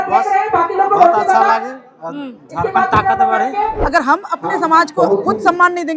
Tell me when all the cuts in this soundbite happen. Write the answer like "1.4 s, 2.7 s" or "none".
3.8 s

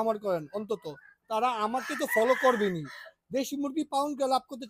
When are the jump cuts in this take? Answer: none

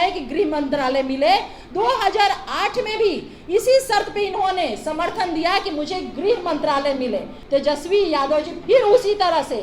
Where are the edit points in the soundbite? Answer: 7.4 s

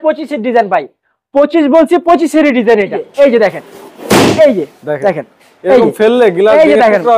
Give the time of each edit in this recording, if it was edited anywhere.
3.0 s

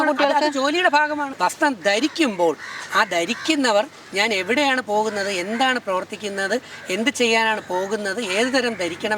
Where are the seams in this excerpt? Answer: 1.3 s

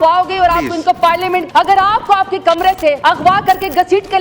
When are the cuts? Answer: 1.5 s, 3.0 s

